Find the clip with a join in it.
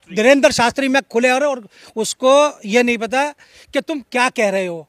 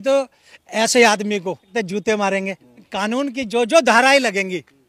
second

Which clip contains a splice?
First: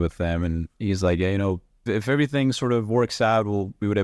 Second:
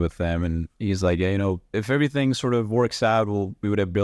second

